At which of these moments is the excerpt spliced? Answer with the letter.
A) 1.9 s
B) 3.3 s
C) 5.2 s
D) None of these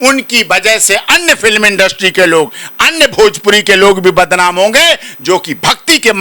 D